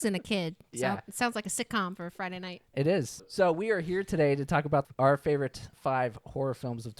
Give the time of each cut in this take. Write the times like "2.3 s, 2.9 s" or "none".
3.3 s, 4.9 s, 5.7 s